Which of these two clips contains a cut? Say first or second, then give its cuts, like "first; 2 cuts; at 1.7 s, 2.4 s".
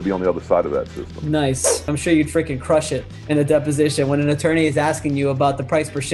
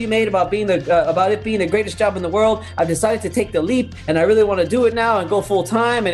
first; 1 cut; at 1.8 s